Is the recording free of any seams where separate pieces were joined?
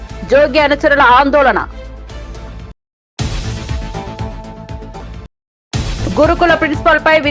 yes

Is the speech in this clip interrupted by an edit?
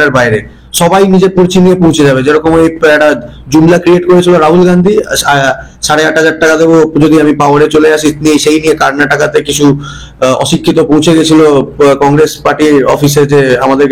no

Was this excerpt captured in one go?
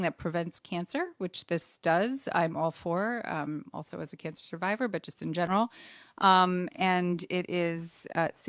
yes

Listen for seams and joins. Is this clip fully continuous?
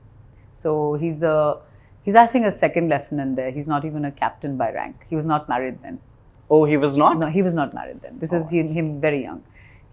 yes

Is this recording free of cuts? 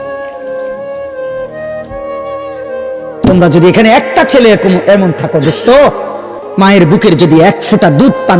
yes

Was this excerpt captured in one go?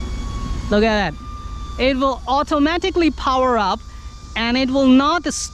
yes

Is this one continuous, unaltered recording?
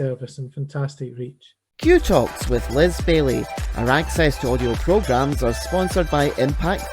no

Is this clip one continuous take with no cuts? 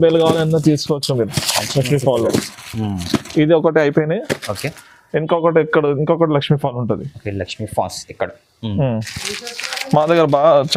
yes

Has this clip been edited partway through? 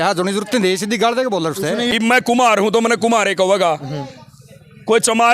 yes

